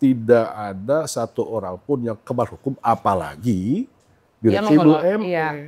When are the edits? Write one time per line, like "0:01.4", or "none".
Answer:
none